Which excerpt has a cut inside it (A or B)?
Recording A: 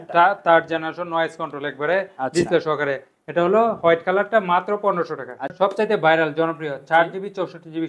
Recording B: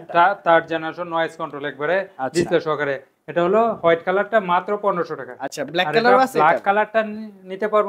A